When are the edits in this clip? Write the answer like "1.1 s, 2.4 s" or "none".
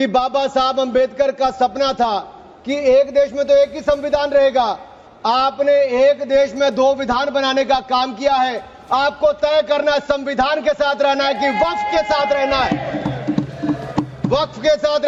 none